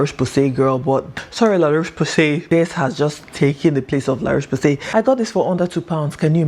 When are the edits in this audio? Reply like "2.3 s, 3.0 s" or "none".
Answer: 1.1 s, 2.4 s, 4.8 s

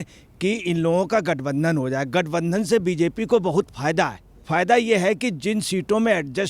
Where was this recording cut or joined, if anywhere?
4.4 s

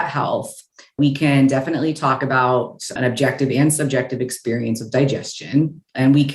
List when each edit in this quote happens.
1.0 s

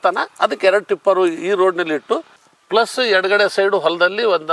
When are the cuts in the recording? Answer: 2.3 s

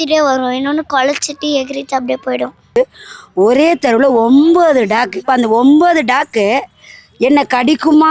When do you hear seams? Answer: 2.8 s, 5.2 s

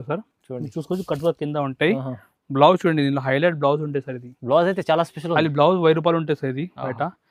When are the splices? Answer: none

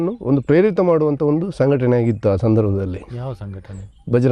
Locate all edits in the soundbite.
none

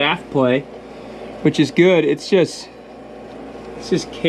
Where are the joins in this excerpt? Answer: none

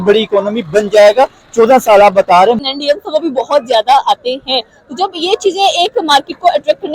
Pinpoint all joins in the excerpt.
2.7 s

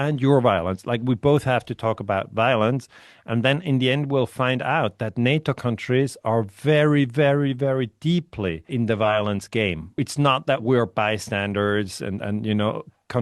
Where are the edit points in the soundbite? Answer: 8.7 s, 10.0 s

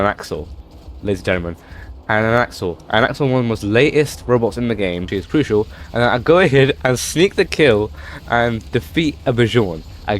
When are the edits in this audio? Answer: 5.1 s

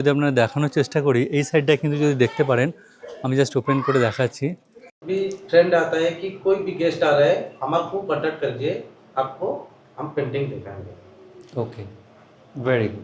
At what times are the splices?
5.0 s

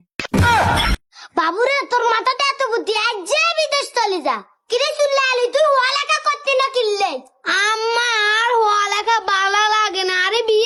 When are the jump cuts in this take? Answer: none

